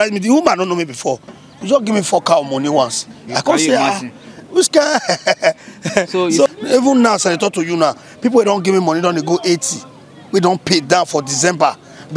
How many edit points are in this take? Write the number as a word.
one